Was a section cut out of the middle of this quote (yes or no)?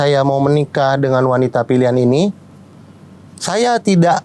no